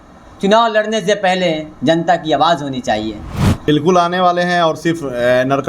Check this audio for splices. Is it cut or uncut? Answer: cut